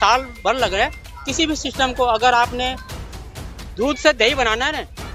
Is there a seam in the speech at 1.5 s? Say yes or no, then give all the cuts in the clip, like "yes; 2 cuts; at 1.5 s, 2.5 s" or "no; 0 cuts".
no; 0 cuts